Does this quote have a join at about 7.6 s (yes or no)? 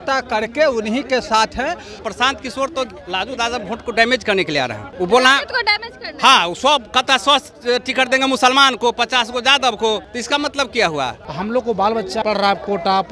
no